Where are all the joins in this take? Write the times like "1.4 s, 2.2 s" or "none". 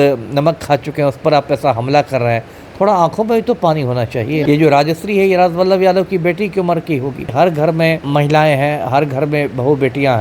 4.4 s, 7.3 s, 8.0 s